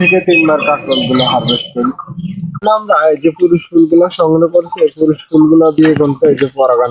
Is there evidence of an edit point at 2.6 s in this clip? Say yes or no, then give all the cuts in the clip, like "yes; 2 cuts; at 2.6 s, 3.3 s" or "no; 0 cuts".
yes; 1 cut; at 2.6 s